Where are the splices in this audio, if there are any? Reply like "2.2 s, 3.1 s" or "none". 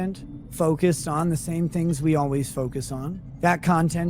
3.2 s